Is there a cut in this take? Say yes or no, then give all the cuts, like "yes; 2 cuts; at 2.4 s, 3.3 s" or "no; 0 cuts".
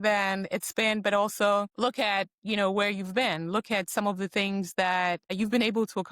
yes; 2 cuts; at 1.7 s, 5.3 s